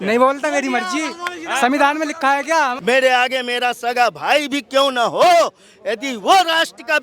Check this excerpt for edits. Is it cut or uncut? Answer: cut